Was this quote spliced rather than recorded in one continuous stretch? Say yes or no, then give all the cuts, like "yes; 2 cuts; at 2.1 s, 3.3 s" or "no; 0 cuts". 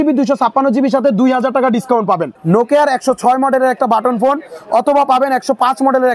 yes; 1 cut; at 2.3 s